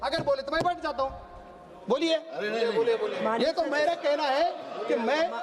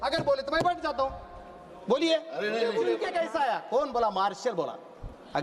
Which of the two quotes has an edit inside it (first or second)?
second